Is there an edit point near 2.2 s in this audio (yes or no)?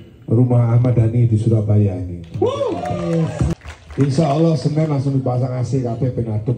no